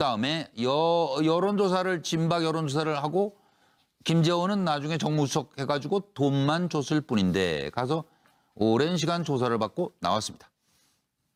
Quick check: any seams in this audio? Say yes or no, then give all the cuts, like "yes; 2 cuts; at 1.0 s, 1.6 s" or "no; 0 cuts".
no; 0 cuts